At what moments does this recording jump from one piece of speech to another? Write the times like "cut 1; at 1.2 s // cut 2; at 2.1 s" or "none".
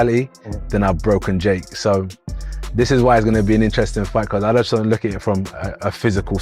none